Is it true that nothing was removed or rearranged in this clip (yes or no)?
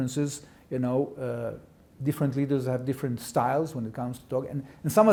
yes